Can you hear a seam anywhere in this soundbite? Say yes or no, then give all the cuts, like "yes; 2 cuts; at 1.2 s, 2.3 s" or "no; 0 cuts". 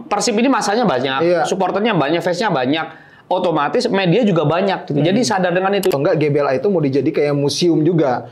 yes; 1 cut; at 5.9 s